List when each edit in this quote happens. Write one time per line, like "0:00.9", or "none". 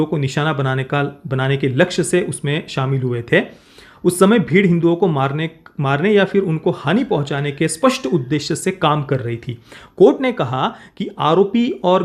none